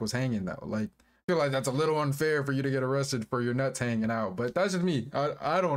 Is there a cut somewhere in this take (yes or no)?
no